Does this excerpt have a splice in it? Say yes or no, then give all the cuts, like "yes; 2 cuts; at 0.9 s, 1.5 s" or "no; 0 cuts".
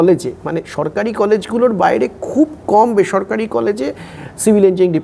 no; 0 cuts